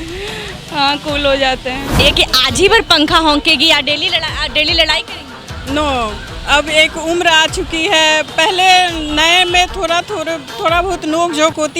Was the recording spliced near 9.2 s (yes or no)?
no